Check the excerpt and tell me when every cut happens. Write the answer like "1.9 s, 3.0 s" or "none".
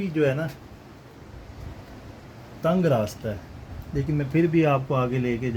none